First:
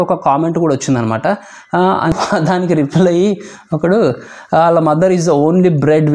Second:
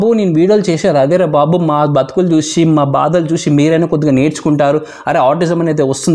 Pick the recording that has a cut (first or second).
first